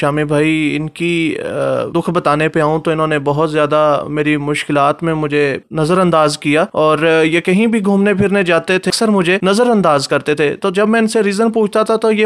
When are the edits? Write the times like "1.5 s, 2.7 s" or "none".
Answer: 1.9 s, 5.6 s, 6.7 s, 9.0 s